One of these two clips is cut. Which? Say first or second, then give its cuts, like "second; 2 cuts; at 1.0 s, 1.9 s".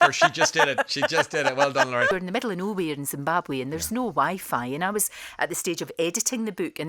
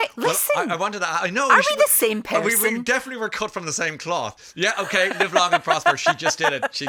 first; 1 cut; at 2.1 s